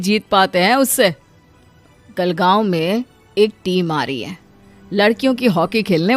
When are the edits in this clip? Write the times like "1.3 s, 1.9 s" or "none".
none